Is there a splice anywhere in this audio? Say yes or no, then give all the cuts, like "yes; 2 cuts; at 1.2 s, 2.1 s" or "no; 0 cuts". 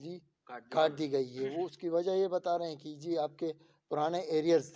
no; 0 cuts